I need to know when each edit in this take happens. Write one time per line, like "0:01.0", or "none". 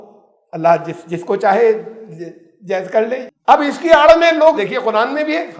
0:03.3
0:04.6